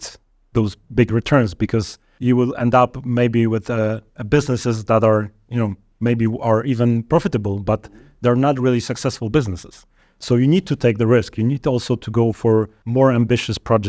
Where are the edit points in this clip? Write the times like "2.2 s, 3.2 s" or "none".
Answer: 2.1 s, 12.8 s

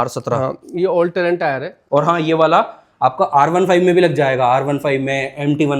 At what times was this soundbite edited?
1.7 s

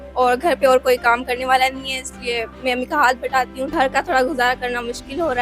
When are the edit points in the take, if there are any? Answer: 3.7 s

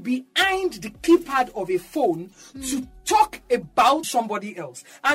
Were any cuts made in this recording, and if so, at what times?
4.1 s

